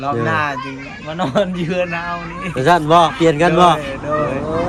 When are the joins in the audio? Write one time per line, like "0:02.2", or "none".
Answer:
none